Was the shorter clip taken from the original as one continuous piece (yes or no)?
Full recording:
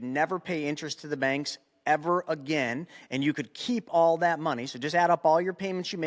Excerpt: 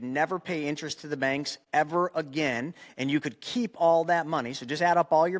no